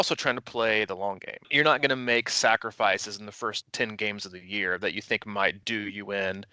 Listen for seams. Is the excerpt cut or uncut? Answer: cut